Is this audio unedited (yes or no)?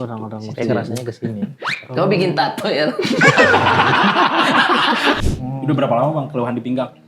no